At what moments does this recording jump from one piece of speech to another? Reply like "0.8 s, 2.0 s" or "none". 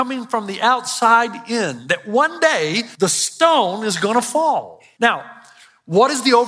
2.9 s, 4.8 s